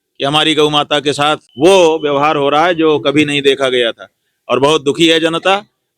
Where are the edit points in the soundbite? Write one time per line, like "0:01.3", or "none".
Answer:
0:01.5